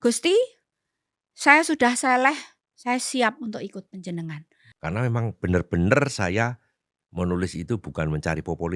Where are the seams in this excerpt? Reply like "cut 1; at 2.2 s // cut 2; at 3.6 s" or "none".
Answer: cut 1; at 4.6 s